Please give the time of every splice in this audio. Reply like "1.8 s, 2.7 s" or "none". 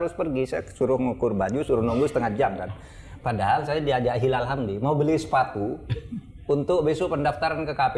none